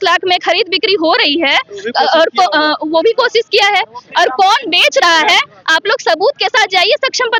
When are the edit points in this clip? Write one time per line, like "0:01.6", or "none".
none